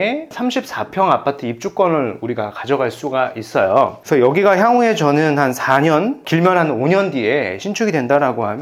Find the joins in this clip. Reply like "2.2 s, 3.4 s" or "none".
none